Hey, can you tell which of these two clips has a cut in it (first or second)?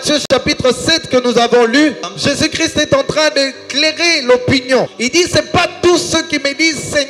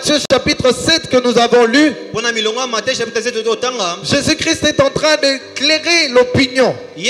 first